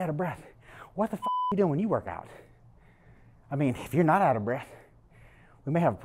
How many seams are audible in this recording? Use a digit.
0